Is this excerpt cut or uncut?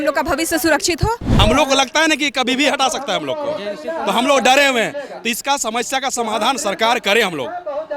cut